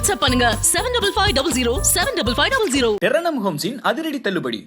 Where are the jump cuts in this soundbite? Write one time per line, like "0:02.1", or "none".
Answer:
0:03.0